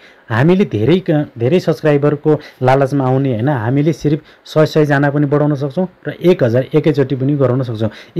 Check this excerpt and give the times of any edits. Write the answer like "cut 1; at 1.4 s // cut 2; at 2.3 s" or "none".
none